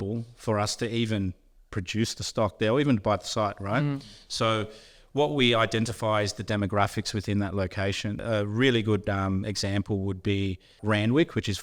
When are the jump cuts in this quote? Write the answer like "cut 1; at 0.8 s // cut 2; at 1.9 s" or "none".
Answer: cut 1; at 8.2 s // cut 2; at 10.8 s